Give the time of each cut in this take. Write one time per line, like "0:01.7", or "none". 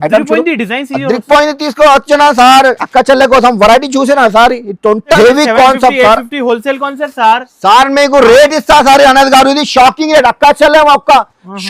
0:05.2